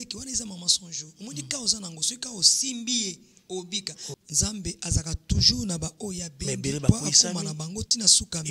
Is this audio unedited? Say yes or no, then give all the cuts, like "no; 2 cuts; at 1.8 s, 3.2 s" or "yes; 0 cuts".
no; 1 cut; at 4.0 s